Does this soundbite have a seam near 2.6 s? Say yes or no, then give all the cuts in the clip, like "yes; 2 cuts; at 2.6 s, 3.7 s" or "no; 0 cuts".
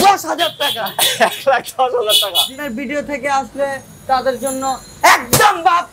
yes; 1 cut; at 2.6 s